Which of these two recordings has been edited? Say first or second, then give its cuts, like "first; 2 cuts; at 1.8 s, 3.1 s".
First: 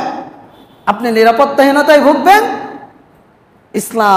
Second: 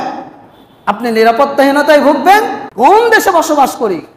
second; 1 cut; at 2.6 s